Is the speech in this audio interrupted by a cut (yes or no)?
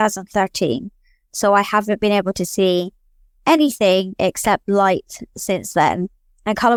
no